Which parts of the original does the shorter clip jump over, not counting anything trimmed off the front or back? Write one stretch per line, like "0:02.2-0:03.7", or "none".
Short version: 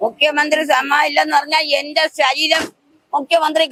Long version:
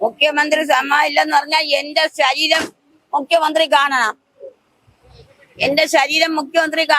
none